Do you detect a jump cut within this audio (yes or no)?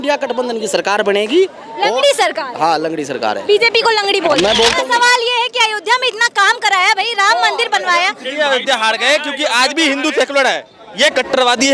yes